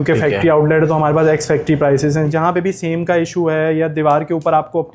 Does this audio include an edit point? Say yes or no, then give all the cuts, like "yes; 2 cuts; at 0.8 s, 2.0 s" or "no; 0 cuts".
yes; 1 cut; at 2.3 s